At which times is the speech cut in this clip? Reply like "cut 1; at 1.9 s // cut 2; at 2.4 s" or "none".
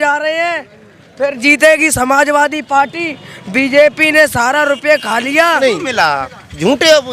cut 1; at 5.6 s